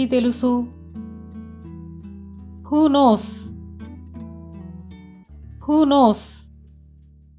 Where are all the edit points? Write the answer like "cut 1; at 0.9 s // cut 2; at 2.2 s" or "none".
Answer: none